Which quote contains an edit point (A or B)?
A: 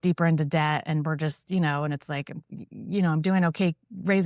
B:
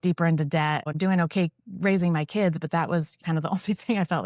B